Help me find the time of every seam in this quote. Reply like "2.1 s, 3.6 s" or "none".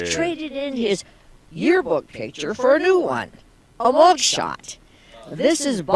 1.8 s